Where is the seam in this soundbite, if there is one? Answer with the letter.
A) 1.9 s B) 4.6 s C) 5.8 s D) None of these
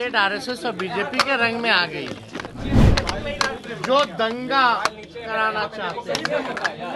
D